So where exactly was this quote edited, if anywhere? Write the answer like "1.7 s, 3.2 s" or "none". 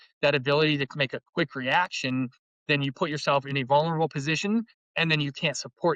none